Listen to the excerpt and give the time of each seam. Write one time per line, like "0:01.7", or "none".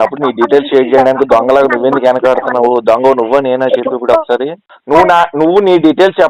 0:04.6